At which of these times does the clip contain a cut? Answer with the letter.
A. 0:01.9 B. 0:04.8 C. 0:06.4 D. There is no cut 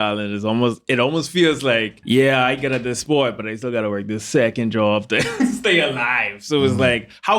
A